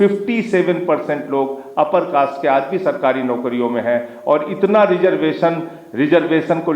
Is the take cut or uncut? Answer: uncut